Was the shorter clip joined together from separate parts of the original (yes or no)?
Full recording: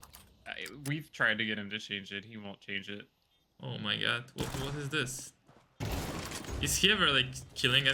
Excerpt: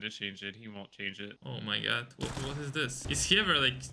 yes